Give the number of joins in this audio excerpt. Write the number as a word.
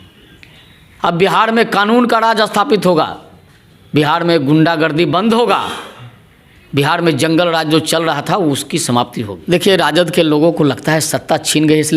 one